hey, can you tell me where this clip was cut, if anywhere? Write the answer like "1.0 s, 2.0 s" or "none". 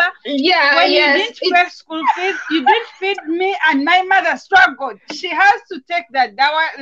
none